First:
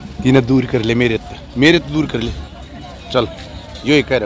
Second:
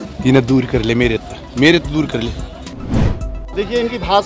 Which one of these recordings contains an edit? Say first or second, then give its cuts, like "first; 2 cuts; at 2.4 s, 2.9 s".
second; 1 cut; at 3.1 s